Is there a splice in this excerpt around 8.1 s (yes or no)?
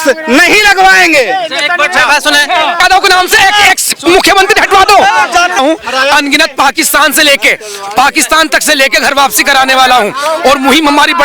no